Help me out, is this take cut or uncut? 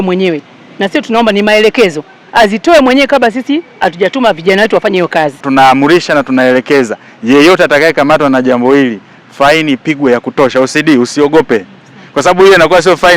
cut